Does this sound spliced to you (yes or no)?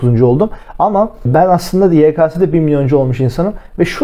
yes